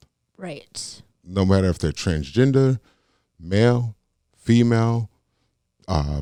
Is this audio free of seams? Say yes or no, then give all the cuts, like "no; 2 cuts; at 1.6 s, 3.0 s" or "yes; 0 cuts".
yes; 0 cuts